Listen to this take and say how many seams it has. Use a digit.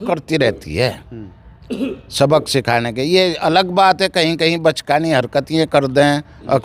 0